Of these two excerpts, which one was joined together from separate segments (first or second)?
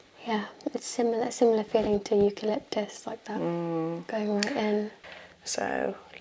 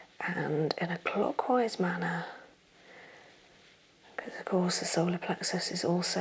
first